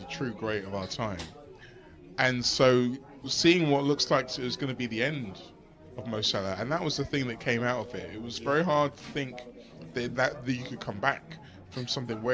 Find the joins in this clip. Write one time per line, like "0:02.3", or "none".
none